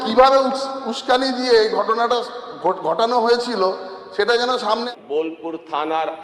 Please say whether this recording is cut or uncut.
cut